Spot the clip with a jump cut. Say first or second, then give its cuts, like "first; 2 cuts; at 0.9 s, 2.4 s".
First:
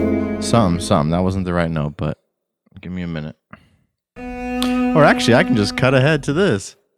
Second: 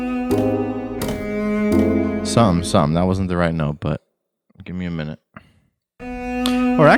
second; 1 cut; at 0.9 s